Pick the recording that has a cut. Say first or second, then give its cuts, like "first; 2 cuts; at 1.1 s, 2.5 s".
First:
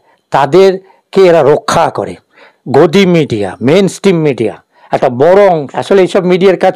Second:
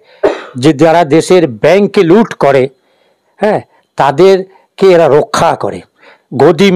first; 1 cut; at 5.7 s